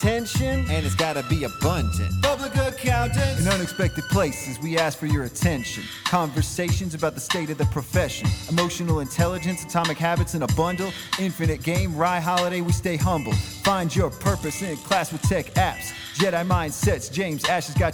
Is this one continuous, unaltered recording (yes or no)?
yes